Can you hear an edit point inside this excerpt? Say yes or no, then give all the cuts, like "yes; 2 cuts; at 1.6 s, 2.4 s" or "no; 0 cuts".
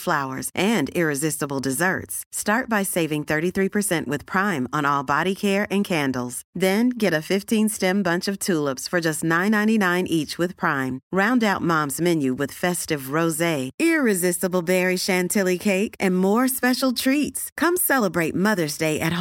no; 0 cuts